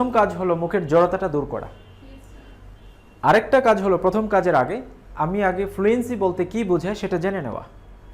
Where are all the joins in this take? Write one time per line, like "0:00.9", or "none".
none

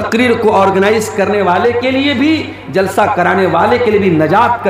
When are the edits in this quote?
none

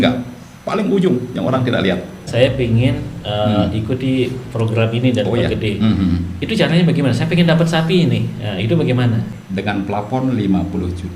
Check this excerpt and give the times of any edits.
0:02.3
0:09.3

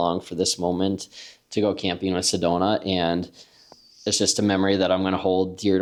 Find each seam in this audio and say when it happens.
none

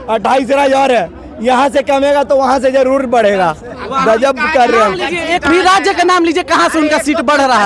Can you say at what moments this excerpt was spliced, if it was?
none

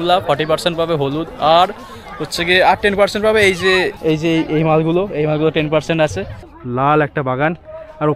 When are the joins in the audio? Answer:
0:03.9
0:06.3

